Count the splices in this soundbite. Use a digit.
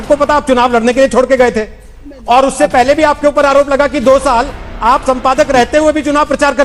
0